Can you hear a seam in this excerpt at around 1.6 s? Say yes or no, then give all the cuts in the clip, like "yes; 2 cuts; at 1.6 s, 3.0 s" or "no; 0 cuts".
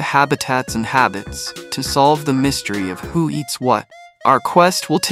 no; 1 cut; at 3.9 s